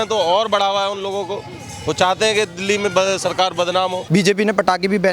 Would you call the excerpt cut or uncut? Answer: cut